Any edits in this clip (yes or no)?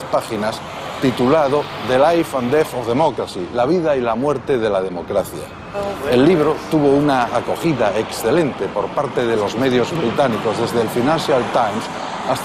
no